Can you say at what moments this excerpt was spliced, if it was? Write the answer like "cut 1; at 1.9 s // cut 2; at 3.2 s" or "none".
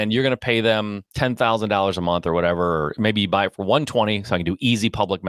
cut 1; at 1.0 s